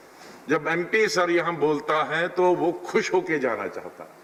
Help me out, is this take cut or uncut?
uncut